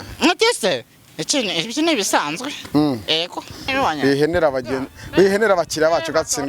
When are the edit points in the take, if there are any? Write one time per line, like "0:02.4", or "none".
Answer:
0:03.7